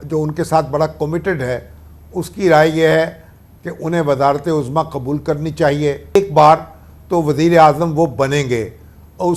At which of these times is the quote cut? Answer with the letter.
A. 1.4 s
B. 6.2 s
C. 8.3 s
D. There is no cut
B